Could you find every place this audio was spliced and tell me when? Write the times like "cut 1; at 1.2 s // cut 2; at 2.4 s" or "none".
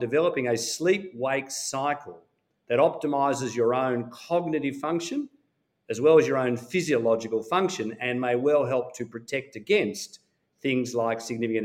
none